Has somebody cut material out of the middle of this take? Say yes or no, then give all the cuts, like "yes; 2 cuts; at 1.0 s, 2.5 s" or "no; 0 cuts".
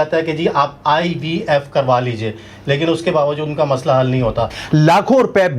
yes; 1 cut; at 4.5 s